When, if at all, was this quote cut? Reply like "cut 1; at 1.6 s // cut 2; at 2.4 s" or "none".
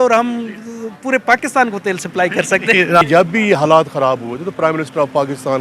cut 1; at 3.0 s